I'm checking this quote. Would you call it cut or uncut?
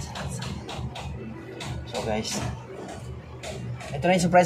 uncut